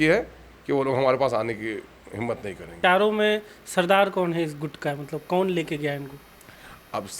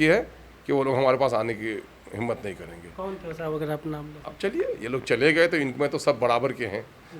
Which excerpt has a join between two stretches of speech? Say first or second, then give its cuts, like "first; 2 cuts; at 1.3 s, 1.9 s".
first; 1 cut; at 2.7 s